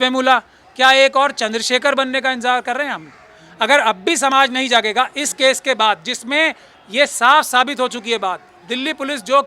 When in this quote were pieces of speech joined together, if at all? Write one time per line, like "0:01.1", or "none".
none